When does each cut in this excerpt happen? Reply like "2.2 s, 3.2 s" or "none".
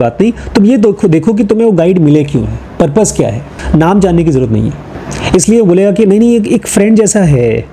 3.5 s